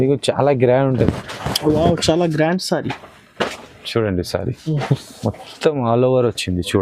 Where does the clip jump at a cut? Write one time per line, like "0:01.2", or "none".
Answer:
0:01.0